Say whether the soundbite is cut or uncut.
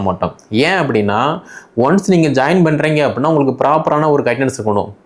uncut